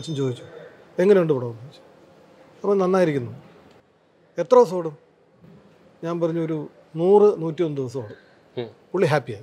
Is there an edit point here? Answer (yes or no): no